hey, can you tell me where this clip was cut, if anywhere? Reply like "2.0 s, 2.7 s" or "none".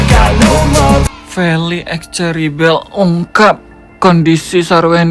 1.1 s